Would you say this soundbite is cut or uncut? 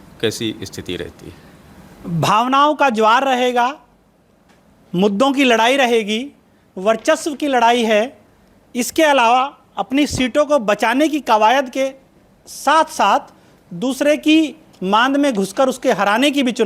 uncut